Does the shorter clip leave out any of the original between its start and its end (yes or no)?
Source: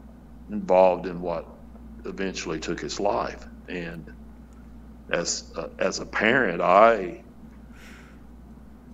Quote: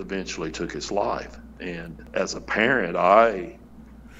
yes